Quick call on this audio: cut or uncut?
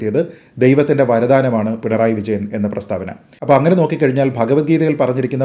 cut